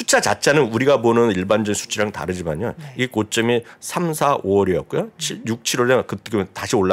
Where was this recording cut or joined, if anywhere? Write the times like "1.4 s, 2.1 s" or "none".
none